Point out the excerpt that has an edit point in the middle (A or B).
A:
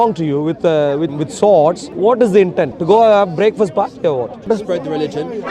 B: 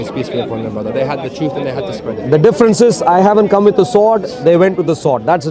A